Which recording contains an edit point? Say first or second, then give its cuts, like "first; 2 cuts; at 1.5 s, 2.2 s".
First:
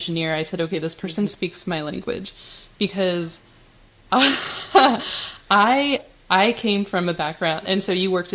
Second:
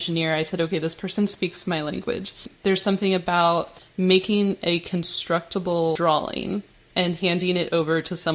second; 4 cuts; at 2.5 s, 3.8 s, 6.0 s, 6.8 s